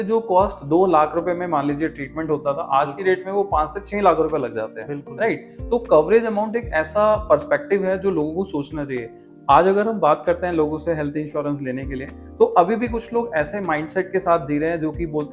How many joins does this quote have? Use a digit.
0